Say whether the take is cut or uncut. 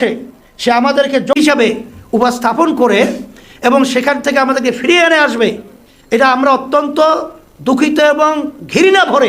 cut